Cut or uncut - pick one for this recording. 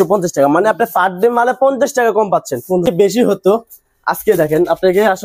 cut